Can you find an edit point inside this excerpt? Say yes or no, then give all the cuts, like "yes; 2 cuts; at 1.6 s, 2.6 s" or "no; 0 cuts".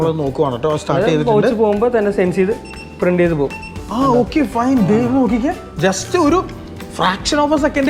no; 0 cuts